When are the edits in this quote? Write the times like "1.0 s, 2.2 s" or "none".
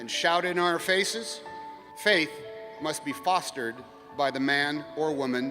1.6 s